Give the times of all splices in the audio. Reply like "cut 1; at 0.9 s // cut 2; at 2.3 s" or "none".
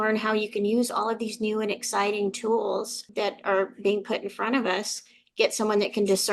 cut 1; at 3.0 s